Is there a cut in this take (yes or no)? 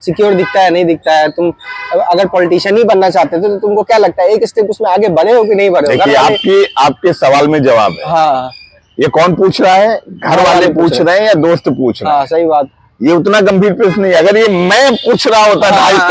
no